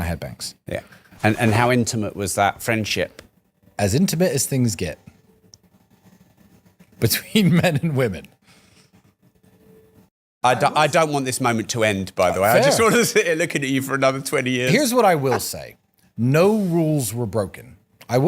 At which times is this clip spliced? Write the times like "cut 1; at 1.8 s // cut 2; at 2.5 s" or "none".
cut 1; at 1.0 s